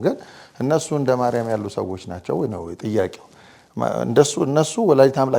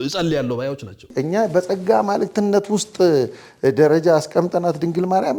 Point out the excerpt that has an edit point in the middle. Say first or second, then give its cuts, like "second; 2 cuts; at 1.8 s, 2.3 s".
second; 1 cut; at 1.1 s